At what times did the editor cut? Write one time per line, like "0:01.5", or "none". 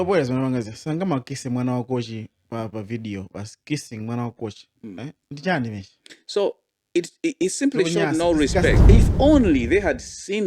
0:08.8

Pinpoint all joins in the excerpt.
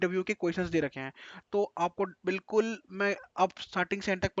none

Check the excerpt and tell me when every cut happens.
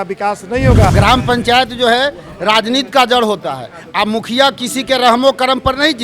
0:00.9

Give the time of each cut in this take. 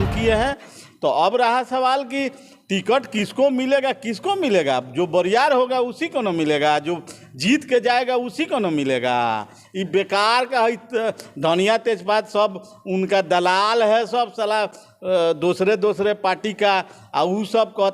none

